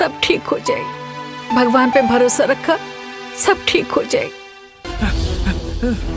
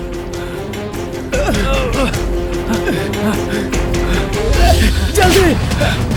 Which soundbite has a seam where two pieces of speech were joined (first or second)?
first